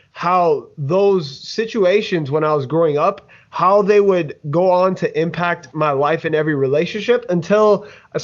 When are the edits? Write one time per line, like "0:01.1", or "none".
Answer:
none